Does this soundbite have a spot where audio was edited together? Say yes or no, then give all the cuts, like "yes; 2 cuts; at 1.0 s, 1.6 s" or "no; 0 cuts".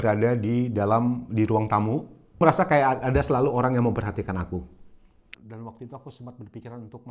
yes; 2 cuts; at 2.4 s, 5.3 s